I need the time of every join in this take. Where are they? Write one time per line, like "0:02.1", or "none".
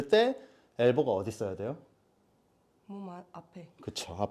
none